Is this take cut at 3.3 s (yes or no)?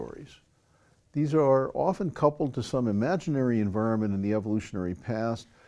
no